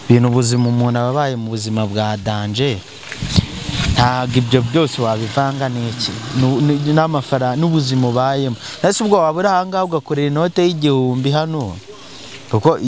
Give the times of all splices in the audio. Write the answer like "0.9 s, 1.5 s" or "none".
none